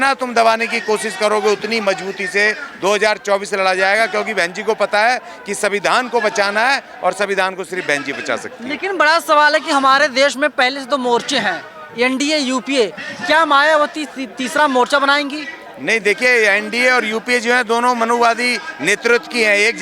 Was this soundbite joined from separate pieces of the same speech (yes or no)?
no